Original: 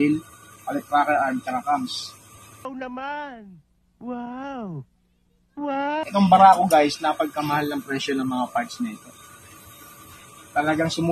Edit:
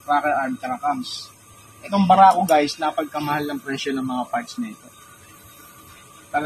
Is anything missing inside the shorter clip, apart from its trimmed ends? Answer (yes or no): yes